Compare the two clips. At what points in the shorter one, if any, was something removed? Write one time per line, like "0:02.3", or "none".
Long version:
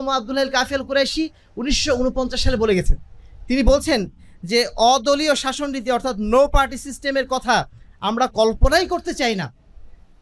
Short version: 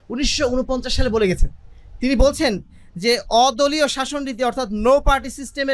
none